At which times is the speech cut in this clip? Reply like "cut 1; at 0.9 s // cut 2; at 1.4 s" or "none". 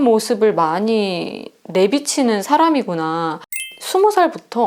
cut 1; at 3.7 s